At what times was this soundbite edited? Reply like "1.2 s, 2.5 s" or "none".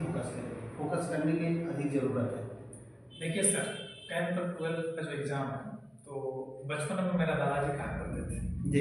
none